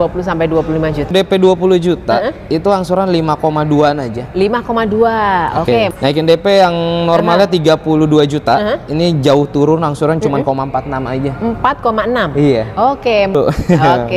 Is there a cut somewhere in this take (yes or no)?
yes